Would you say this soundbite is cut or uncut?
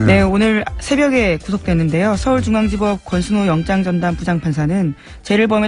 cut